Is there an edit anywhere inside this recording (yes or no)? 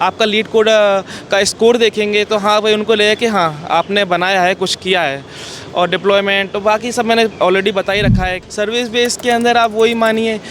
yes